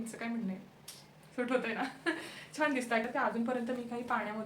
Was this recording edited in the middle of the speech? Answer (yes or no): yes